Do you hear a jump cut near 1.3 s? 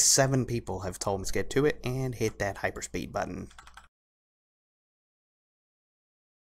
no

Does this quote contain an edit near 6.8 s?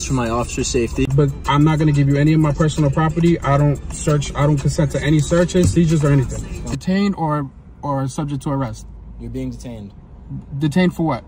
yes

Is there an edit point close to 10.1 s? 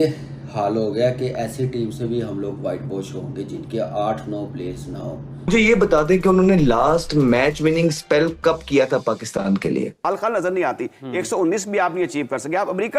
yes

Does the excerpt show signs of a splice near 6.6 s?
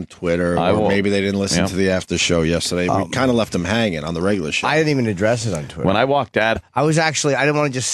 no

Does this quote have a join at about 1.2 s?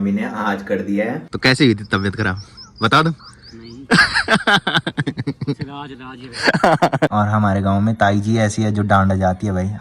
yes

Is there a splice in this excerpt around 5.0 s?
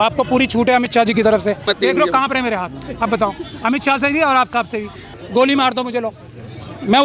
yes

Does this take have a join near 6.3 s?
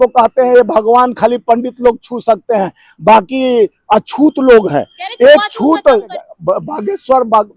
yes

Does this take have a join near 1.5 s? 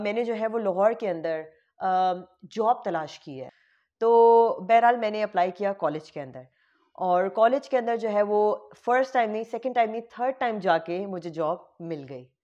no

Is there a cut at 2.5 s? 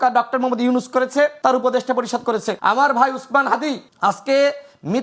yes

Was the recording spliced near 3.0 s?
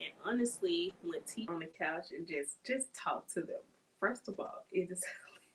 no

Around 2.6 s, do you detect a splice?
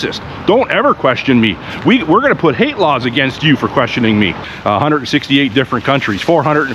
no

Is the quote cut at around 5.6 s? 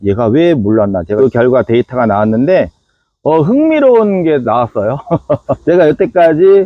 yes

